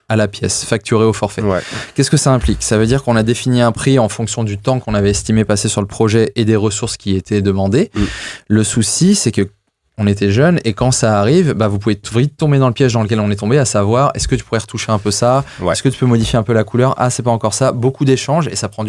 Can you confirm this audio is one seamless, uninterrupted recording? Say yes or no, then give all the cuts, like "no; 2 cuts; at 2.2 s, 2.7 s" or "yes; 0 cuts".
yes; 0 cuts